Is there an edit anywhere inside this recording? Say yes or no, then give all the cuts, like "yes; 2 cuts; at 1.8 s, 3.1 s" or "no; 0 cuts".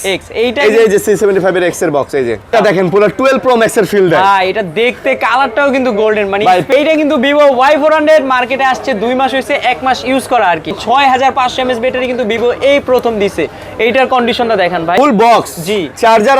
yes; 4 cuts; at 2.5 s, 6.7 s, 10.8 s, 15.0 s